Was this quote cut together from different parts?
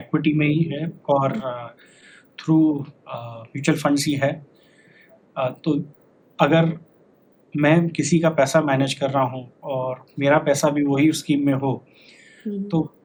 no; 0 cuts

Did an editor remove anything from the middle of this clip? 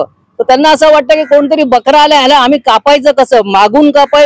no; 0 cuts

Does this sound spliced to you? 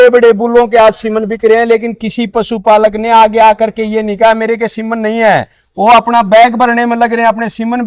no; 0 cuts

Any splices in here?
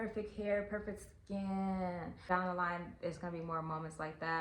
yes; 1 cut; at 2.1 s

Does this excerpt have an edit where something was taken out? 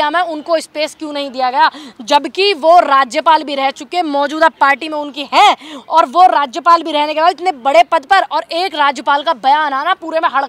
no; 0 cuts

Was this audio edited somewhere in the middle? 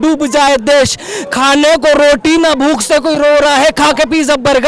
no; 0 cuts

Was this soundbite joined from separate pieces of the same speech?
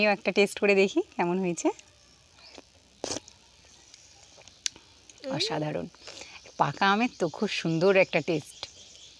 no; 0 cuts

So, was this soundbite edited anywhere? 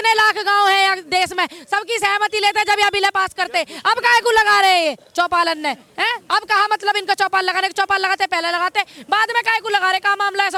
no; 0 cuts

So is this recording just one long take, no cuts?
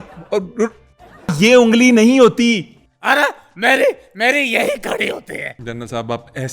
no; 2 cuts; at 1.3 s, 5.5 s

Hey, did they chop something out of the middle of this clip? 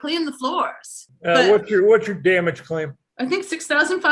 yes; 2 cuts; at 1.1 s, 3.0 s

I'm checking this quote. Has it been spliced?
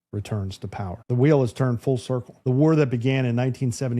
yes; 2 cuts; at 1.0 s, 2.3 s

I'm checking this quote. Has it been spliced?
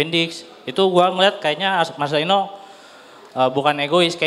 no; 0 cuts

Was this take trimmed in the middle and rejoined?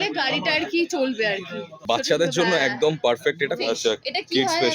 yes; 2 cuts; at 1.8 s, 3.6 s

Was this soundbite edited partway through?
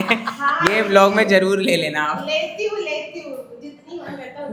no; 0 cuts

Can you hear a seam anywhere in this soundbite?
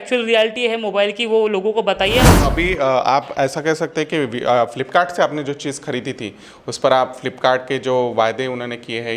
yes; 1 cut; at 2.3 s

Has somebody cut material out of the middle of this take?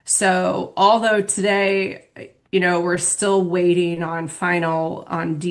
no; 0 cuts

